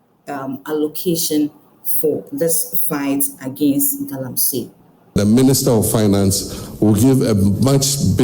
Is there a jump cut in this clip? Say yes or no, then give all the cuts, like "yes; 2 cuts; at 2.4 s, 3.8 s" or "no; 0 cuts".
yes; 1 cut; at 5.1 s